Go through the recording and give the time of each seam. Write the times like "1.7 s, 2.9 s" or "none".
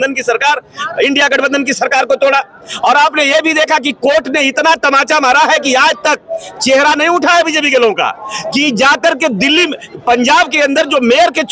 none